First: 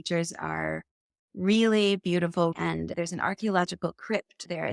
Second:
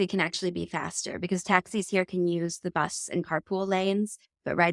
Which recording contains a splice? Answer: first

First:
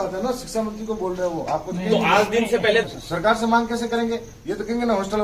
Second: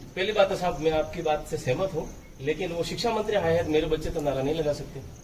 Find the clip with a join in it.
first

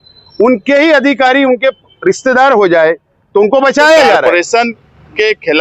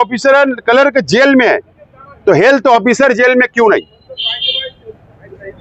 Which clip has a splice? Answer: first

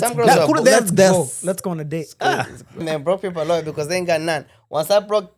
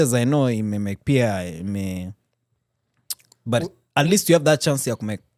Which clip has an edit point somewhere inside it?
first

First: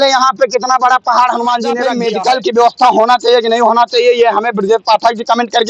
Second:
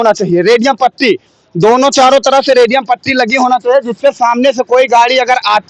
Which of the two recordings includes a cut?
first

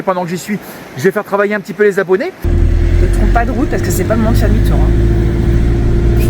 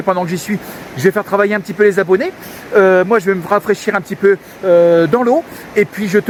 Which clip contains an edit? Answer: first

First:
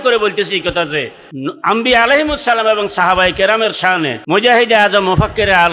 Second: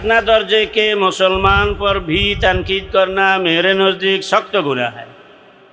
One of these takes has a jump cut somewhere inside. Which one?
first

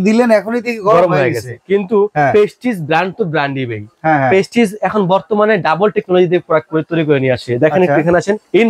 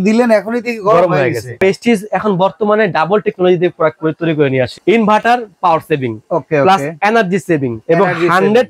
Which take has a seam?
second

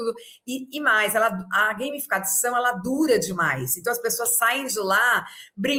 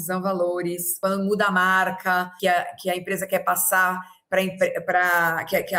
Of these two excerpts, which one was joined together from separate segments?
second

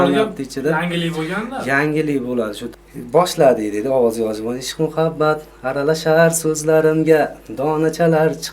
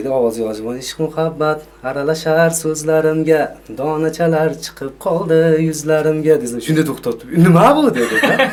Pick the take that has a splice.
first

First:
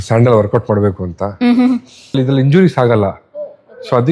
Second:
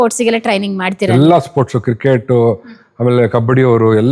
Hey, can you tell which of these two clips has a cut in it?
first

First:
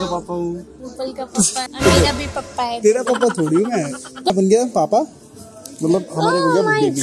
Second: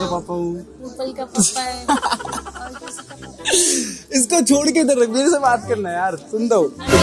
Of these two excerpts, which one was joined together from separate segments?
first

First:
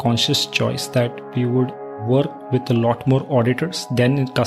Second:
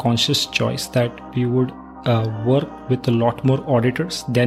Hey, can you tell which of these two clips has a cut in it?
first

